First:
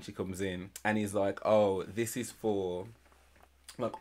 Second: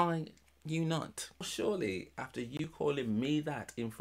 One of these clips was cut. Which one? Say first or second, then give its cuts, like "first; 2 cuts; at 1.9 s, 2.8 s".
second; 1 cut; at 1.5 s